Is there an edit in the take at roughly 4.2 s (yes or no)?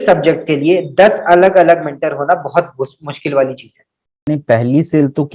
yes